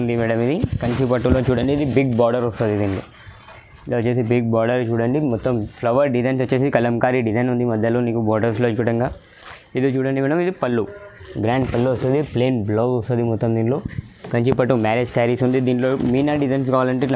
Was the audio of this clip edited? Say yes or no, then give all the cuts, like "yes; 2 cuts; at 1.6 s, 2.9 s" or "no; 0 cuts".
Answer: no; 0 cuts